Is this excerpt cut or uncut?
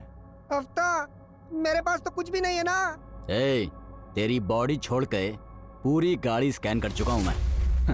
uncut